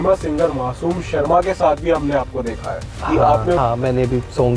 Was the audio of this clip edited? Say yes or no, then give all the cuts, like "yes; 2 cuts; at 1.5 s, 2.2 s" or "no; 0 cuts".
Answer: yes; 1 cut; at 3.6 s